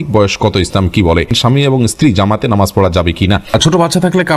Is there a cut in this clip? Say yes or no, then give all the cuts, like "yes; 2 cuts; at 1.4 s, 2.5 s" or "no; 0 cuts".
yes; 2 cuts; at 1.4 s, 3.4 s